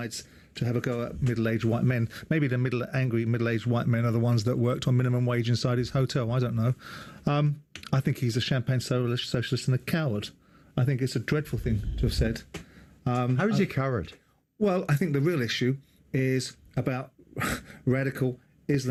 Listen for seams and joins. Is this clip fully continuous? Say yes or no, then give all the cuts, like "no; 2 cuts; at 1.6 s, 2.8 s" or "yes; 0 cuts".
yes; 0 cuts